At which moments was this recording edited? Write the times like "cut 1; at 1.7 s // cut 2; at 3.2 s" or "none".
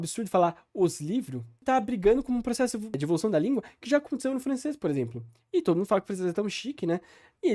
cut 1; at 1.6 s // cut 2; at 3.0 s